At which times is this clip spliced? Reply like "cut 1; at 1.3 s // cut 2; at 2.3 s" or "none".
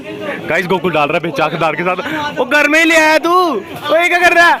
none